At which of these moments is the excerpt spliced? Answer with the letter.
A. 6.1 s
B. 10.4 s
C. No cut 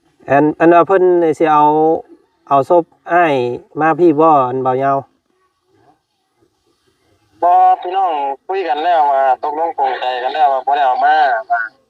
C